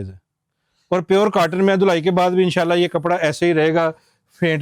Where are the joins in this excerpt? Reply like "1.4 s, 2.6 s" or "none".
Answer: none